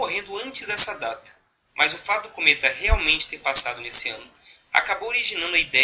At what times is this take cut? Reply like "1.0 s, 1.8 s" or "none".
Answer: 4.4 s